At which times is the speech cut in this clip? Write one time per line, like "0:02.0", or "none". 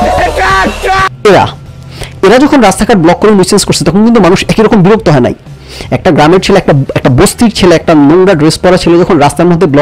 none